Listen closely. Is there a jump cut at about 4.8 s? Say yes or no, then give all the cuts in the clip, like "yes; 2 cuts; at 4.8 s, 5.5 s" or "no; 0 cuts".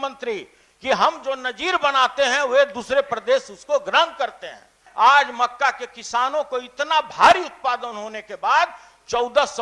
yes; 1 cut; at 4.8 s